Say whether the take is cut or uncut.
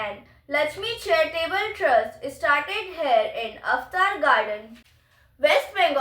cut